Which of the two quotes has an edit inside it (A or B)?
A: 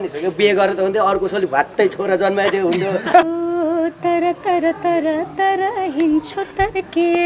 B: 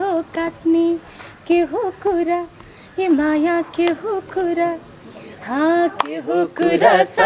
A